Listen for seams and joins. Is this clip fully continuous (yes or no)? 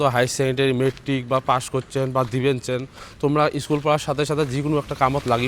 yes